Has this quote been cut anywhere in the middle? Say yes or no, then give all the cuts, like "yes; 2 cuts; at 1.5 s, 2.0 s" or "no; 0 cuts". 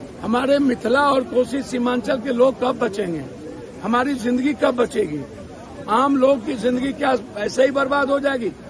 no; 0 cuts